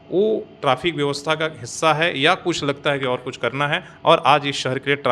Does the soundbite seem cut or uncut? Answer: uncut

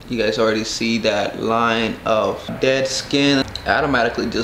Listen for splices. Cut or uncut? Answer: cut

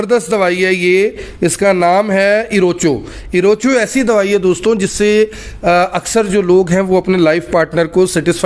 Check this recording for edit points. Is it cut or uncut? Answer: uncut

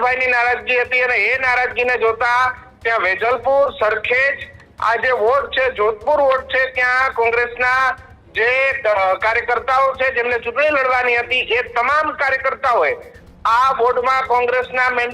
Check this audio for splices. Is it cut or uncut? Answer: uncut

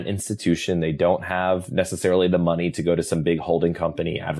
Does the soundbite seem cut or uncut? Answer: uncut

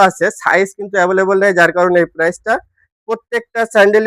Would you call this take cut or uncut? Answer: uncut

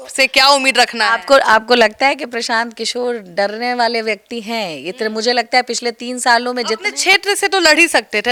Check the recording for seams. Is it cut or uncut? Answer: uncut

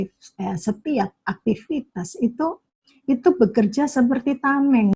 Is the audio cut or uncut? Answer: uncut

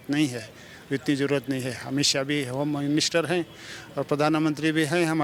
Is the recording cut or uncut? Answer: uncut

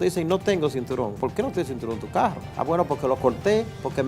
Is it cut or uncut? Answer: cut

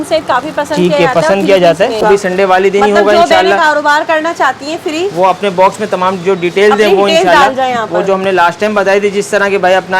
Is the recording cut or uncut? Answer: cut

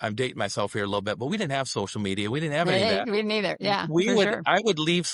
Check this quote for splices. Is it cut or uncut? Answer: uncut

